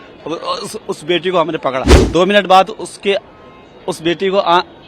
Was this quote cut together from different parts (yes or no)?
yes